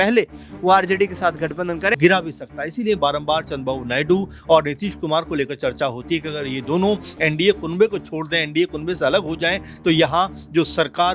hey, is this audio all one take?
no; 1 cut; at 2.0 s

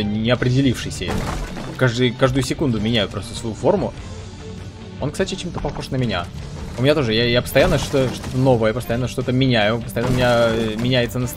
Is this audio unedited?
yes; 0 cuts

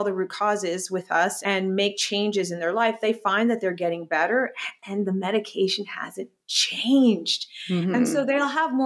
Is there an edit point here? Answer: yes; 1 cut; at 1.4 s

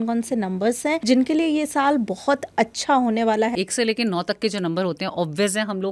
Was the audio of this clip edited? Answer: yes; 2 cuts; at 1.0 s, 3.5 s

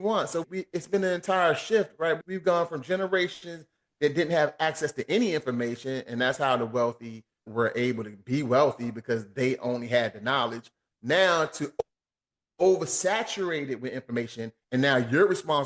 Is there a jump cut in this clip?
no; 0 cuts

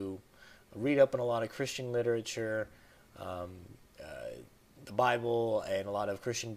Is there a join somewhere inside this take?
yes; 1 cut; at 5.2 s

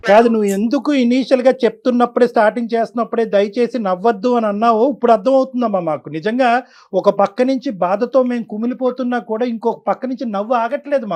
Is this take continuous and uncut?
yes; 0 cuts

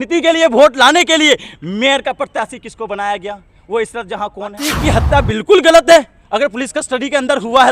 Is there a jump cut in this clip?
yes; 1 cut; at 4.7 s

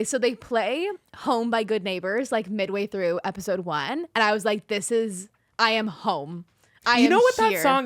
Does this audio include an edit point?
no; 0 cuts

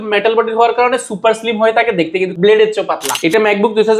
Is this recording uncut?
no; 2 cuts; at 2.3 s, 3.1 s

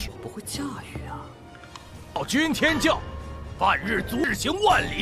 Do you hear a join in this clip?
no; 0 cuts

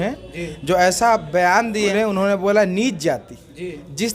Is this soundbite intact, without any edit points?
no; 1 cut; at 1.9 s

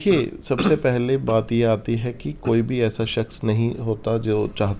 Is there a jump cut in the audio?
no; 0 cuts

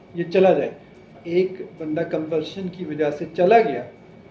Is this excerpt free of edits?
no; 1 cut; at 1.2 s

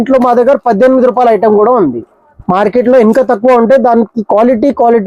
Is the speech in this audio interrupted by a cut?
no; 0 cuts

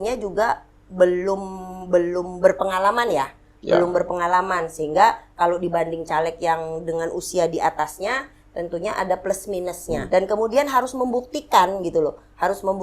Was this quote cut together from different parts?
yes; 1 cut; at 10.0 s

